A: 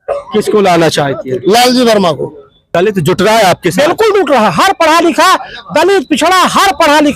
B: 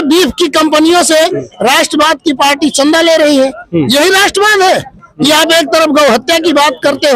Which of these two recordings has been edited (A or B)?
A